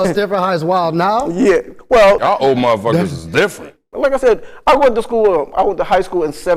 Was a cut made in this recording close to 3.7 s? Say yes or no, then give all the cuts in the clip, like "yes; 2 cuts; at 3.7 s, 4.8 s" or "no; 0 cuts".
yes; 2 cuts; at 2.2 s, 3.7 s